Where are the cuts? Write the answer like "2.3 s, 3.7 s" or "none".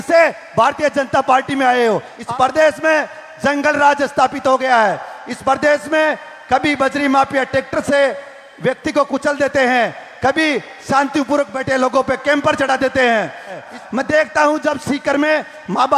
2.1 s, 13.7 s